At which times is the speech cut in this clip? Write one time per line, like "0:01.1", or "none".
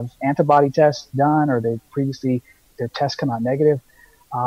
0:02.7